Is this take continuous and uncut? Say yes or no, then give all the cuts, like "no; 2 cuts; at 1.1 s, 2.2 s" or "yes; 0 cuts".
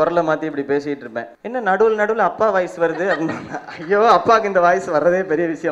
no; 1 cut; at 1.3 s